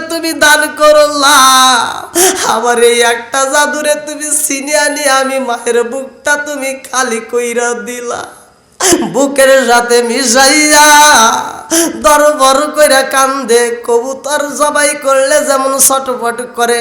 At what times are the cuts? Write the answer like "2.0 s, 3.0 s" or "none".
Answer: 8.9 s